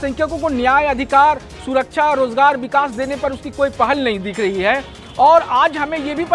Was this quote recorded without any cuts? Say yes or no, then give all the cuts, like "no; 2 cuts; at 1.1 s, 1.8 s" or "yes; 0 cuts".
yes; 0 cuts